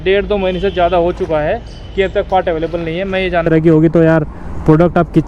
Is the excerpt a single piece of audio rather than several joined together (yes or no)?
no